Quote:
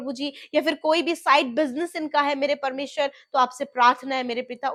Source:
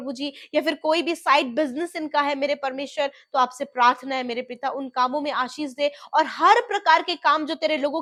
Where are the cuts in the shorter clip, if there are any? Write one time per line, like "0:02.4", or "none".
none